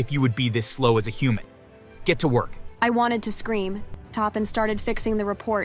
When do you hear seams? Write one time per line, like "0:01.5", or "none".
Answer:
0:04.1